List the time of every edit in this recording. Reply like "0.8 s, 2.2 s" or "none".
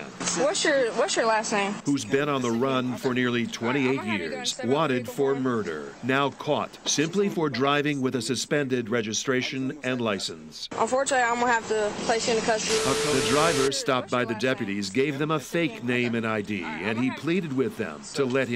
13.0 s

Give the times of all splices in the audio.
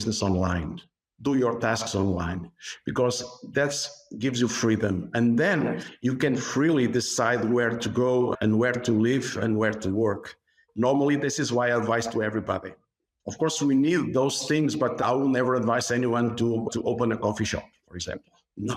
none

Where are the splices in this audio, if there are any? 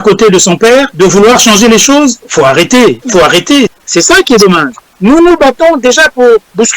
0.9 s, 2.2 s, 3.2 s

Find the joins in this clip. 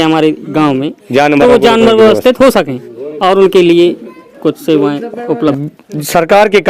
5.6 s

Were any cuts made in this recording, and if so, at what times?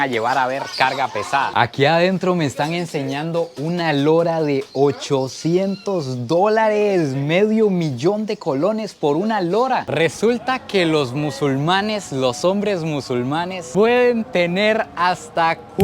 9.8 s

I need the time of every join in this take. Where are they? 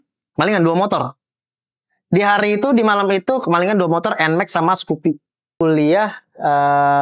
5.5 s

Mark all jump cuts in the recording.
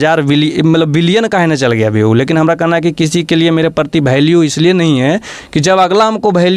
none

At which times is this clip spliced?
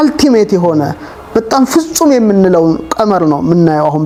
none

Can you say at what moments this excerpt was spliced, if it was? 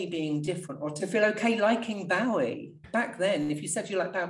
2.7 s

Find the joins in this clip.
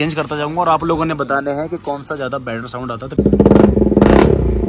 3.2 s

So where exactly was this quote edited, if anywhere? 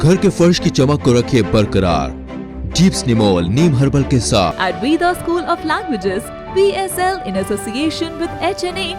4.6 s

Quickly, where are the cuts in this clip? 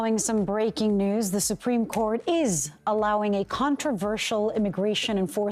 none

